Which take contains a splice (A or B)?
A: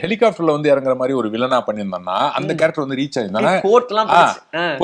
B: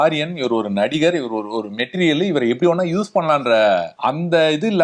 B